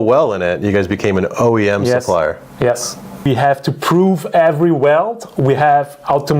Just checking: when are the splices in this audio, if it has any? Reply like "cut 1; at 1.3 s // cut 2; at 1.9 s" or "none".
cut 1; at 3.3 s